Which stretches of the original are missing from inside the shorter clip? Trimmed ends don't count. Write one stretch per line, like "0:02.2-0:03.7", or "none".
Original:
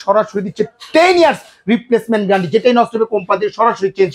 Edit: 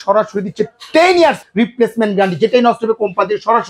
0:01.4-0:01.6